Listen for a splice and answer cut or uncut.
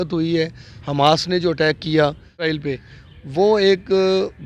cut